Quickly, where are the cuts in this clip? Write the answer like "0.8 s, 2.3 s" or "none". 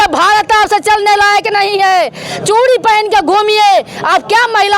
none